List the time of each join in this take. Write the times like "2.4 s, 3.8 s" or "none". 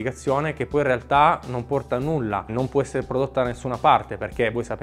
2.5 s